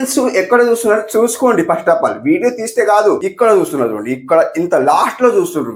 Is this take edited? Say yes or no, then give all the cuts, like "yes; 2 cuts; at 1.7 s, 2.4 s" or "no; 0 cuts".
yes; 1 cut; at 3.3 s